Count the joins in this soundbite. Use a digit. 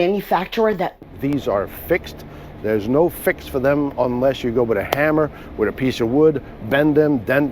1